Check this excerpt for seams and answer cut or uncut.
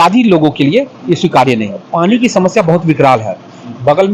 cut